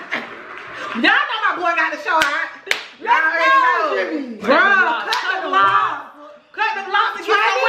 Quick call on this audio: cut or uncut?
cut